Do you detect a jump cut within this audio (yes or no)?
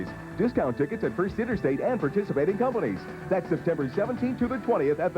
yes